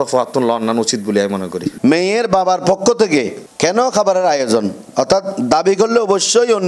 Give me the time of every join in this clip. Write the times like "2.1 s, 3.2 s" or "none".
1.7 s